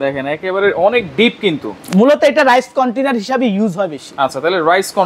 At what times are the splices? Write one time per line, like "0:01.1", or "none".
none